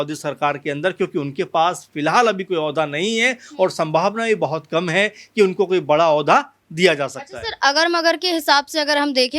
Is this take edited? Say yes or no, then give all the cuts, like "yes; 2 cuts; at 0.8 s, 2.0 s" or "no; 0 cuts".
no; 0 cuts